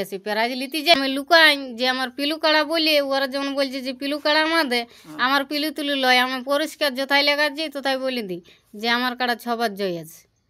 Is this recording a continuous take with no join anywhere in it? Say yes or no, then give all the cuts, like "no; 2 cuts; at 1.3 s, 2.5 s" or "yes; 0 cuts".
no; 1 cut; at 0.9 s